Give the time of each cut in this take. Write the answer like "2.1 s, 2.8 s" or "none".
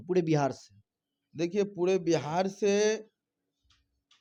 none